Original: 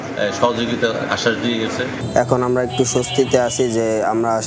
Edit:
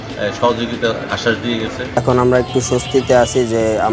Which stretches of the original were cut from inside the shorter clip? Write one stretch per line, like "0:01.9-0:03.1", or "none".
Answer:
0:02.0-0:02.2